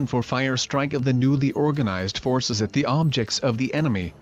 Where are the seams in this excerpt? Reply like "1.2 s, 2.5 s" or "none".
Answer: none